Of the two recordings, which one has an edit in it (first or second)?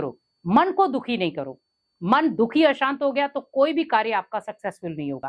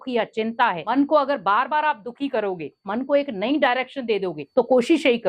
second